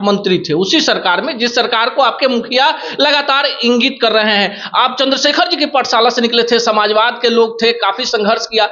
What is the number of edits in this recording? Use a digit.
0